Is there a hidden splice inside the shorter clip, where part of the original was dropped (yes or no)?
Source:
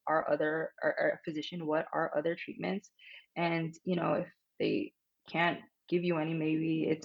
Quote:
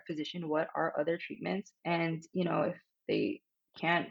yes